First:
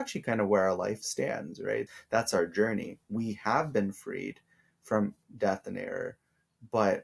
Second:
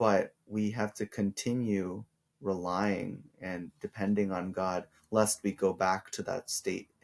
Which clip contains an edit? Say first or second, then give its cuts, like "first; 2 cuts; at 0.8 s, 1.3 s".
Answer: first; 1 cut; at 1.9 s